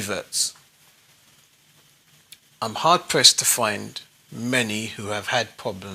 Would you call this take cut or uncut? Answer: cut